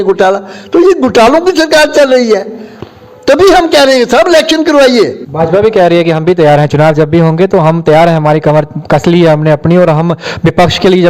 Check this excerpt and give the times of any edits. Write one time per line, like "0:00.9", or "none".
0:05.2